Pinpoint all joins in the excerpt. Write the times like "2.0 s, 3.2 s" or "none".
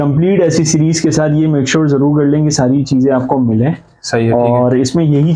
none